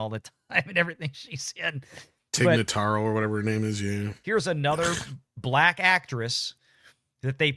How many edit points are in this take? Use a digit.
1